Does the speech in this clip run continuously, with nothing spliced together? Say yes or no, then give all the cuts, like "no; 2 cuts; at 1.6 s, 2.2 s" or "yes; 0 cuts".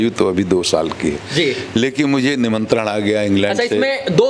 yes; 0 cuts